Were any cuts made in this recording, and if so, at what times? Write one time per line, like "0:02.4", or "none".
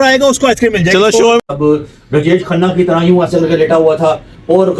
0:01.4

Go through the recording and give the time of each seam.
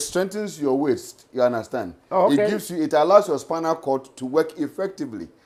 none

